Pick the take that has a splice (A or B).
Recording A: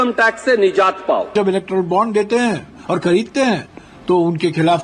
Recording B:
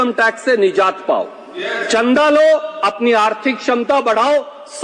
A